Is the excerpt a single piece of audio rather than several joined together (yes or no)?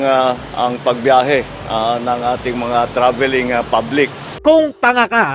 yes